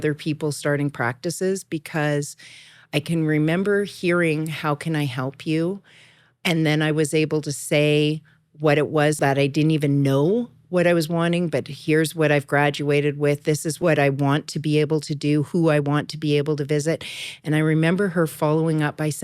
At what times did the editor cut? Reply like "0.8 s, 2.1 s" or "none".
6.4 s, 9.2 s, 13.7 s